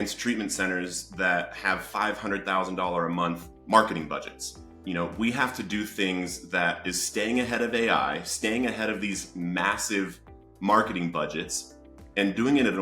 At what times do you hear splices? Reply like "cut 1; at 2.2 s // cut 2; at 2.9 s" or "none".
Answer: none